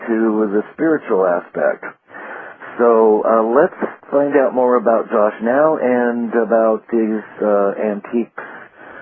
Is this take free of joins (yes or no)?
no